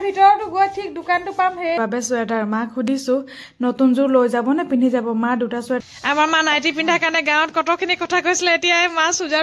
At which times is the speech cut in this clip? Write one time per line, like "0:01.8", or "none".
0:01.8
0:05.8